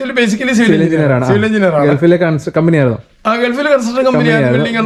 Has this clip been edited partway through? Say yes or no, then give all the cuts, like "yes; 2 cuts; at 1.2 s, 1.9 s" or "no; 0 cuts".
no; 0 cuts